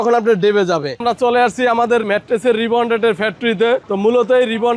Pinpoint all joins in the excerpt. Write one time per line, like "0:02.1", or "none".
0:00.9
0:02.0
0:03.8